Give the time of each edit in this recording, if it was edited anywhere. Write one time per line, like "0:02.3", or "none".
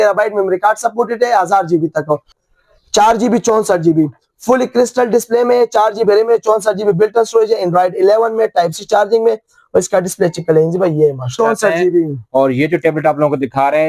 0:02.4
0:11.3

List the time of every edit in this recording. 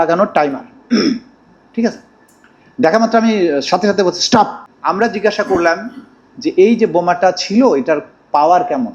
0:04.7

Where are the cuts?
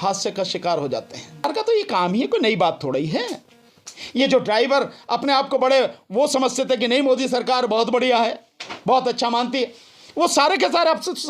0:01.4

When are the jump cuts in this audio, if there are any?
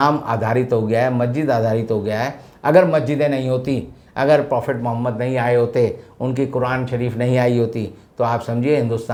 none

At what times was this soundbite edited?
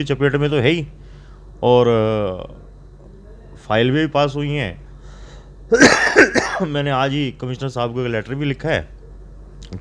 none

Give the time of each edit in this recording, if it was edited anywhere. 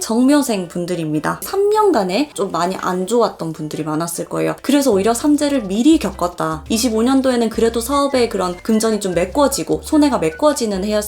0:01.4
0:02.3
0:06.6

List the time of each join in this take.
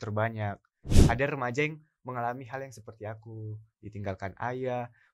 0:00.9

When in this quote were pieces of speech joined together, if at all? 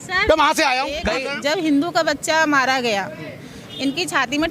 0:01.2

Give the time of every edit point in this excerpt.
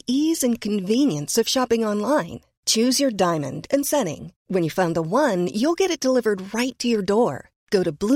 none

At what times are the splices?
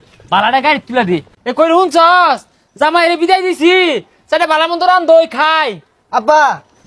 0:01.3

